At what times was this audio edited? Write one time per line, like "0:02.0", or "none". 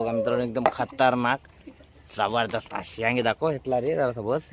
none